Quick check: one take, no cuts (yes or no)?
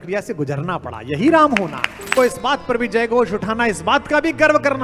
no